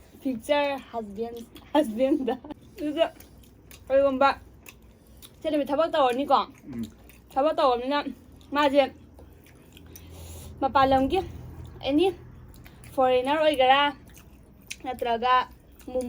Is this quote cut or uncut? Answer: cut